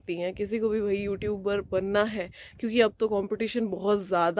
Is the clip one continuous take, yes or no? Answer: yes